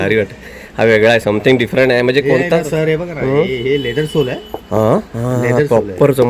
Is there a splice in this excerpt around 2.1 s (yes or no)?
no